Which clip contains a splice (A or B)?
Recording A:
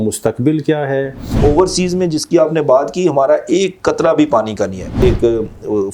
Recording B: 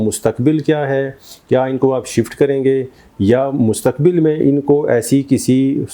A